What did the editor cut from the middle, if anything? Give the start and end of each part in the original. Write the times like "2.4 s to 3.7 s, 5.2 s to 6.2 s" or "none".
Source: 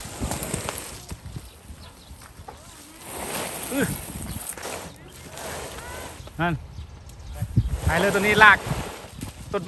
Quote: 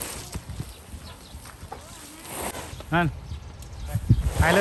3.3 s to 6.0 s